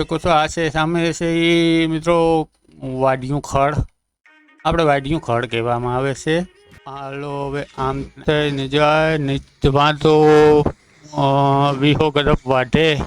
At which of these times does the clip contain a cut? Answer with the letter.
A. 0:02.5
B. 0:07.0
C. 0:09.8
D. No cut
B